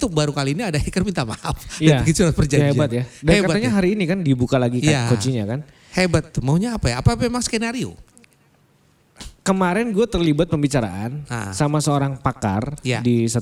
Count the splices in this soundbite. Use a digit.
0